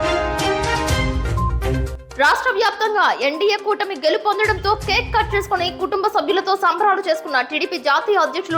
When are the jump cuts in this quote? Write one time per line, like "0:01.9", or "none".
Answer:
0:01.9

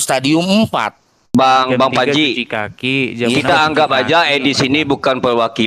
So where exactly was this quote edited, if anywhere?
0:01.3

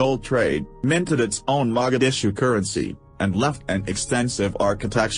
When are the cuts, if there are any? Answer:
none

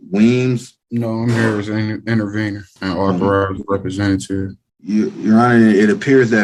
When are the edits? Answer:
none

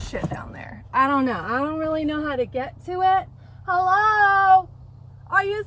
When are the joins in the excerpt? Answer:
none

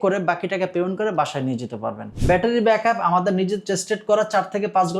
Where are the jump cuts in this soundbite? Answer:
0:02.1

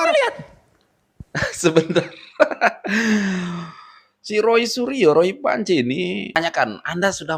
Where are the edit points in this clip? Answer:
0:06.4

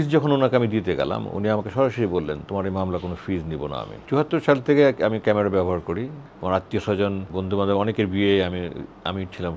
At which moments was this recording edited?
0:04.0
0:06.2
0:07.3

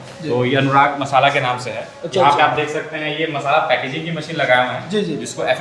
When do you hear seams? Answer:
none

